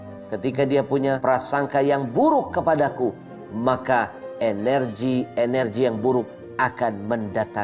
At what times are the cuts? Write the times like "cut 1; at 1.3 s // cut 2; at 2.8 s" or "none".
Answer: cut 1; at 1.2 s